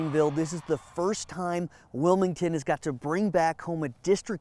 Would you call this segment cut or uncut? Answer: uncut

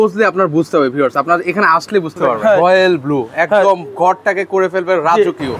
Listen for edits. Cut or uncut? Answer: cut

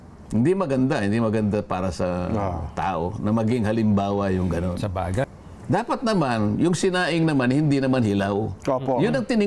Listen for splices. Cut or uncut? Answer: cut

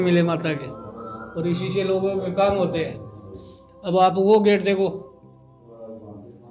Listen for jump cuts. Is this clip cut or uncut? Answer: uncut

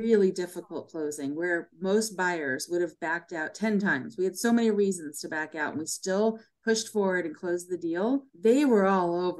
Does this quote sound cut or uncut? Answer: cut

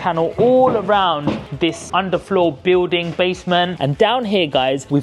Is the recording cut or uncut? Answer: cut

